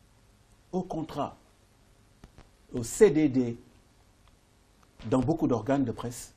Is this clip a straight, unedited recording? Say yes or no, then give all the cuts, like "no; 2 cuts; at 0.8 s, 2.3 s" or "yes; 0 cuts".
no; 1 cut; at 4.1 s